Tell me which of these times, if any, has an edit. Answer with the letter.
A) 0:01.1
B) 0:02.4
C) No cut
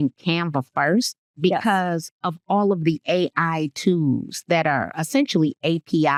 C